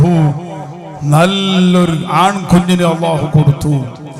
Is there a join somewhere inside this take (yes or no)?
no